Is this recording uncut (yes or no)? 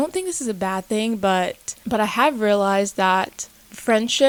yes